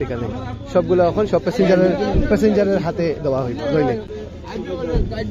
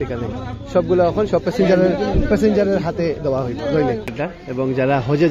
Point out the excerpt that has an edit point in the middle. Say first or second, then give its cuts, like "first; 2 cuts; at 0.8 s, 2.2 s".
second; 1 cut; at 4.1 s